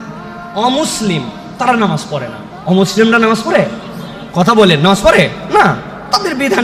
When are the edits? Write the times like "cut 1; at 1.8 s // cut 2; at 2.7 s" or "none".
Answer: none